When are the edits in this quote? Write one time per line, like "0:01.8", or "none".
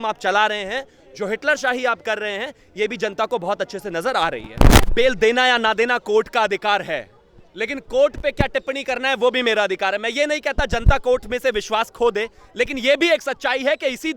0:04.9